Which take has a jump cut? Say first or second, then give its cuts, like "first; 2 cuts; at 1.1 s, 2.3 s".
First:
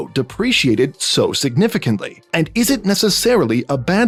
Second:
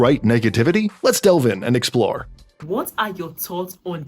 second; 1 cut; at 2.6 s